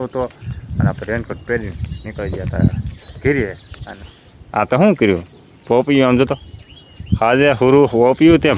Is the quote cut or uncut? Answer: cut